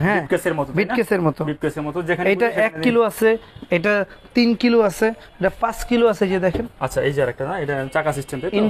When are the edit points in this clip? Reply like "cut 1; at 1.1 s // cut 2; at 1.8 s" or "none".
none